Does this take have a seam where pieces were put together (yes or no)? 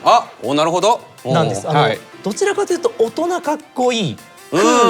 no